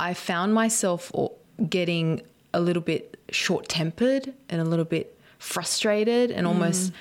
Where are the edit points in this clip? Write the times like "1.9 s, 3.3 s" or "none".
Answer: 1.4 s